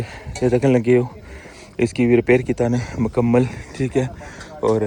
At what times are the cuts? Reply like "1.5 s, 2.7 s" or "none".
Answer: none